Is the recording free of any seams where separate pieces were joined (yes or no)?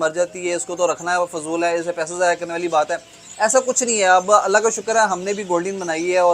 yes